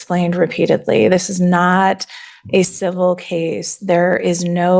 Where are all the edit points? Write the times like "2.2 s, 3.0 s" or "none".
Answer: none